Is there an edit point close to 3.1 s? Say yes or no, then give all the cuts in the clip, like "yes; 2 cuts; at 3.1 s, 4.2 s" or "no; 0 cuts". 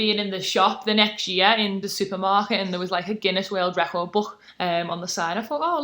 no; 2 cuts; at 1.9 s, 4.4 s